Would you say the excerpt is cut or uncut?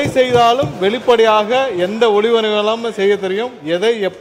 uncut